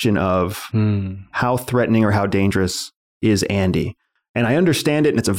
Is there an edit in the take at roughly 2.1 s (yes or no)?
no